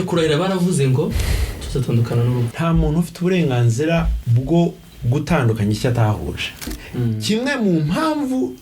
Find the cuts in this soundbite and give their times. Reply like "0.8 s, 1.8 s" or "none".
2.5 s, 4.2 s, 6.7 s